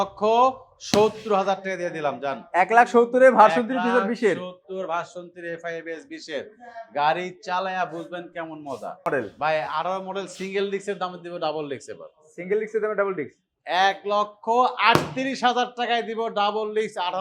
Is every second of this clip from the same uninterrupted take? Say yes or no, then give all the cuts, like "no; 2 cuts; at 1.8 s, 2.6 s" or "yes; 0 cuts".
no; 1 cut; at 9.1 s